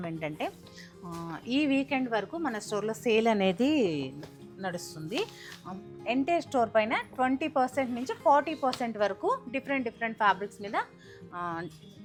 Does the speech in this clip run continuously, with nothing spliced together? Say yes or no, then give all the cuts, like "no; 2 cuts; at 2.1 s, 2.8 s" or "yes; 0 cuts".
yes; 0 cuts